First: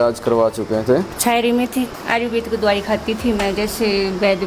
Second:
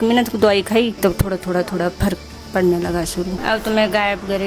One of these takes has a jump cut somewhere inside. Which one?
second; 2 cuts; at 1.0 s, 3.4 s

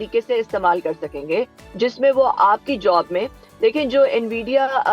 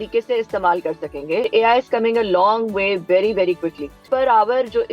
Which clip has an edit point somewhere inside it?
second; 2 cuts; at 1.5 s, 4.1 s

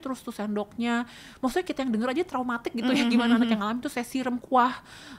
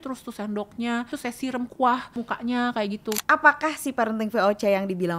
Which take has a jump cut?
second; 3 cuts; at 1.1 s, 2.1 s, 3.2 s

